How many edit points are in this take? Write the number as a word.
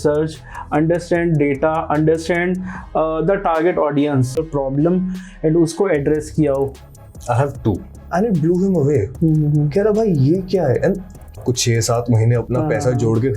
three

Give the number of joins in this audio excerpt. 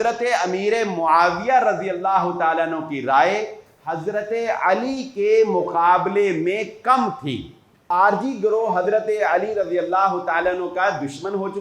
one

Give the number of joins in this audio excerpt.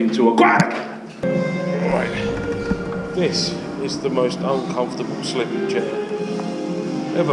one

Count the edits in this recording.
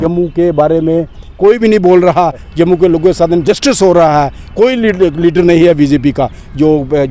one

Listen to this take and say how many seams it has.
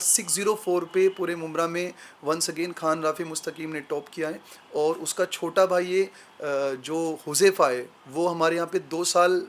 zero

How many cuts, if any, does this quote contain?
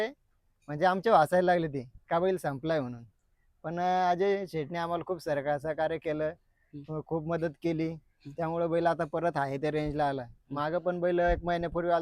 zero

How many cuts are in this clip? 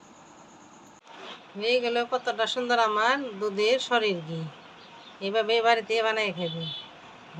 one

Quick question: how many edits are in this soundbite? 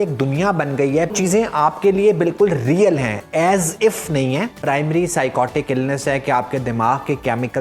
two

